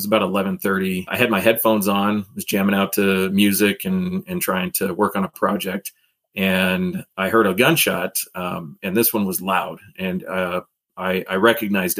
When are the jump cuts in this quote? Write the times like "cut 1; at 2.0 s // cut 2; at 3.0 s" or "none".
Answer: cut 1; at 1.1 s